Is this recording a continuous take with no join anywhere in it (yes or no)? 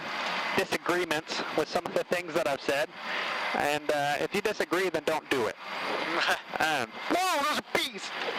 yes